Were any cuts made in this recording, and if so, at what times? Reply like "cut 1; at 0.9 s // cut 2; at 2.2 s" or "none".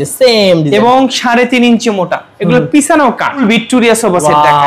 cut 1; at 2.3 s // cut 2; at 3.4 s